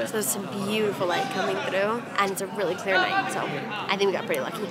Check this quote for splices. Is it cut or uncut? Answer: uncut